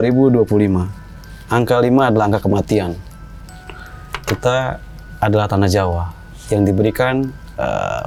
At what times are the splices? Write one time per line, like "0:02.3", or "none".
none